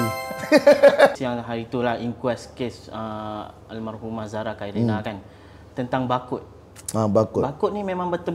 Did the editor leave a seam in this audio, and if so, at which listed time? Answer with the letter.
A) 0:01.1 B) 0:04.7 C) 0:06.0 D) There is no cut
A